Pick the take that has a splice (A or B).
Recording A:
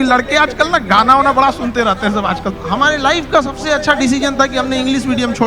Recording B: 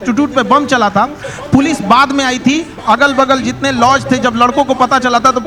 A